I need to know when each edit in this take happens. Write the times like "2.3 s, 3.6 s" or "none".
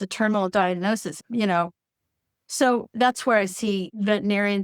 1.2 s